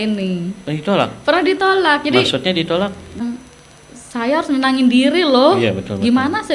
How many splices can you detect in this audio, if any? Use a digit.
1